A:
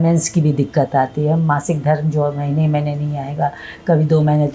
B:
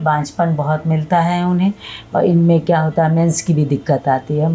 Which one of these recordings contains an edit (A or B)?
B